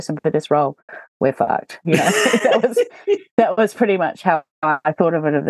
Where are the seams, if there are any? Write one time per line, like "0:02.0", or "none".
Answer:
none